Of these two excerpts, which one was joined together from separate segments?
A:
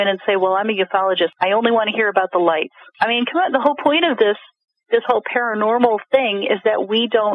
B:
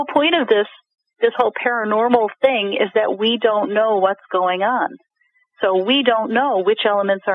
A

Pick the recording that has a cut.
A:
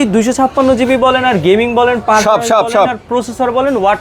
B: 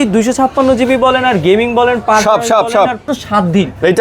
B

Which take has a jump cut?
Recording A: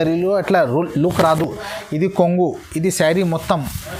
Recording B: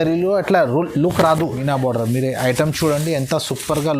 B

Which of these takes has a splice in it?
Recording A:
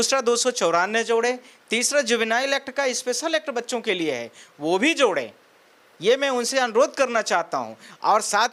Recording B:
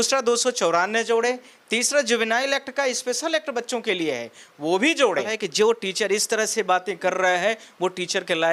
B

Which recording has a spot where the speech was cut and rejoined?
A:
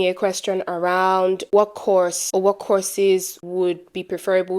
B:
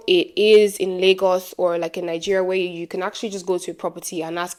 A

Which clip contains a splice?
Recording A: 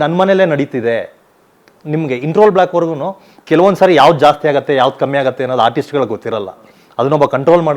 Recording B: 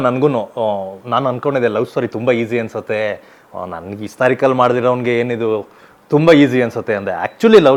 A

